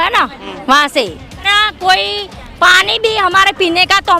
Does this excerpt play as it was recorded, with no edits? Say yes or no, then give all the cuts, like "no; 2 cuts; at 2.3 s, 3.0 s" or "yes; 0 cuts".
no; 1 cut; at 1.5 s